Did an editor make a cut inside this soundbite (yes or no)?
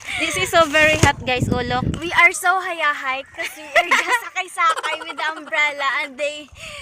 no